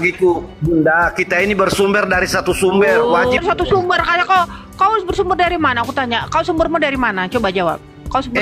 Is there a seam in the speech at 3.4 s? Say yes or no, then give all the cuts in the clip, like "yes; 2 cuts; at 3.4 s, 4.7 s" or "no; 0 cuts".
yes; 1 cut; at 3.4 s